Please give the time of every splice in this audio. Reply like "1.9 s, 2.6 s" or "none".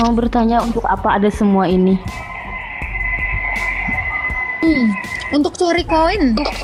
none